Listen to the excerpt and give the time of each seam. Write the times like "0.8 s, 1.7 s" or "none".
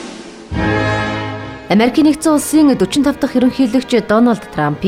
1.5 s